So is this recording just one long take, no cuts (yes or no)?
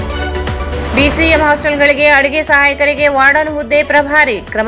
no